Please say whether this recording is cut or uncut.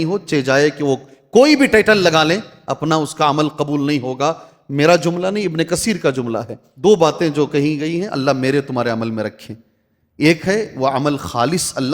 cut